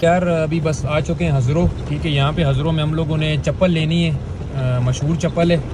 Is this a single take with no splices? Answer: yes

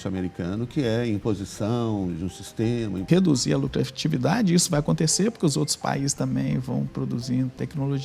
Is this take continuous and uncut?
no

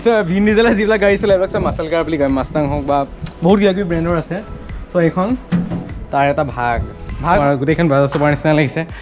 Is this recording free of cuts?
no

